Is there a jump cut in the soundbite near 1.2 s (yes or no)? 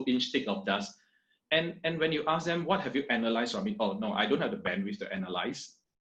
no